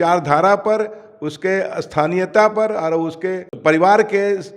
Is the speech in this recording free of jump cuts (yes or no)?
no